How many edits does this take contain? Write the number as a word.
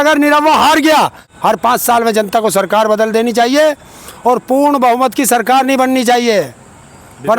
one